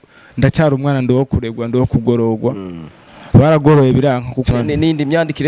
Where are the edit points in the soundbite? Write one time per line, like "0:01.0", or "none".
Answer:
0:04.5